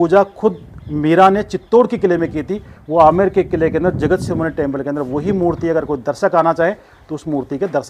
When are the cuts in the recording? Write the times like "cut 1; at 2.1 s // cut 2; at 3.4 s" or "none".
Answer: none